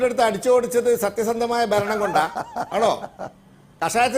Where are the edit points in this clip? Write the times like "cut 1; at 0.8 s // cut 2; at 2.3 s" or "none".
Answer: cut 1; at 2.7 s